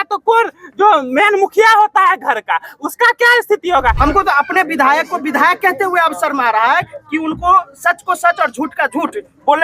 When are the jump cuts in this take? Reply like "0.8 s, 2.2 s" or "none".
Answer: 4.0 s

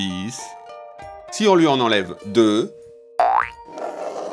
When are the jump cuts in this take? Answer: 0.9 s

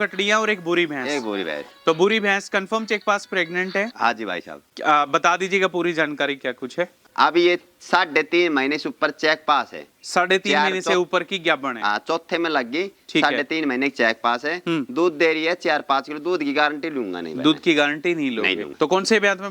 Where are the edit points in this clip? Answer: 7.0 s, 18.6 s

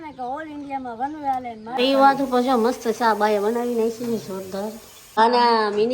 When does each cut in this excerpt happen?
1.8 s, 5.2 s

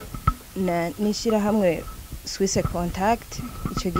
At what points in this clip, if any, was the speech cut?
none

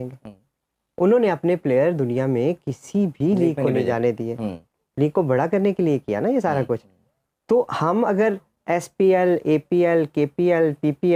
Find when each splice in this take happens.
none

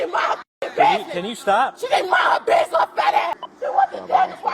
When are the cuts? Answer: 3.3 s

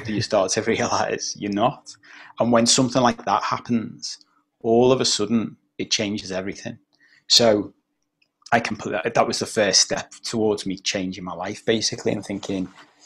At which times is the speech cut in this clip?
none

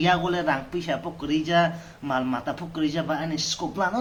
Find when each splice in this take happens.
none

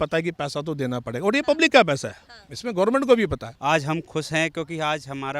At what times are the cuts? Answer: 3.5 s

